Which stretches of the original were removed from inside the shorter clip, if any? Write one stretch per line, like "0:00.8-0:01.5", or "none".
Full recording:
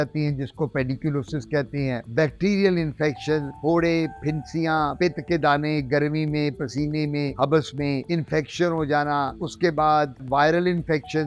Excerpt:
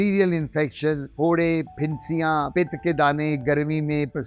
none